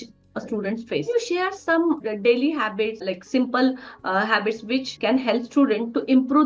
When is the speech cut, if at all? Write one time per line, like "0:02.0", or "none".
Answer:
0:01.1
0:02.0
0:03.0